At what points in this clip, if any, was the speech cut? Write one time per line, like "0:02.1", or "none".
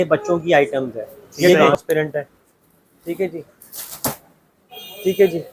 0:01.7